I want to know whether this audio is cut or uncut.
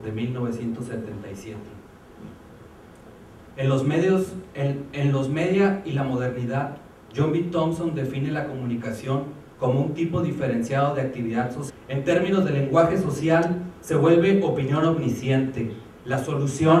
uncut